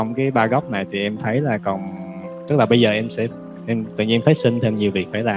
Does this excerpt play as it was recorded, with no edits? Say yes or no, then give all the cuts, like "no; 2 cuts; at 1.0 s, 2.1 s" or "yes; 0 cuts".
yes; 0 cuts